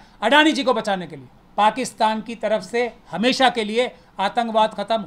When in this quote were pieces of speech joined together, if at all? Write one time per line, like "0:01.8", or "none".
0:01.4